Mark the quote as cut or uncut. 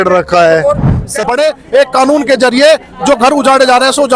cut